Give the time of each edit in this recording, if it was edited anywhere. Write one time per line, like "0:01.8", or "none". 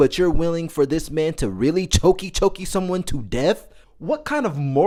none